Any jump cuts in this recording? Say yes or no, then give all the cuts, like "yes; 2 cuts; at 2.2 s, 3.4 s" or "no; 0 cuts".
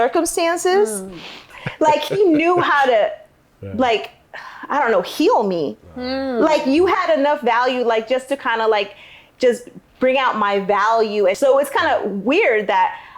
yes; 2 cuts; at 1.5 s, 11.4 s